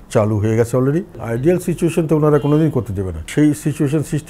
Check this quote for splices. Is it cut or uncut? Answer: cut